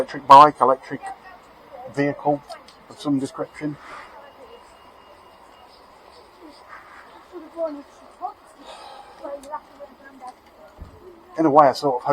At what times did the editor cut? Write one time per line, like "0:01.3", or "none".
none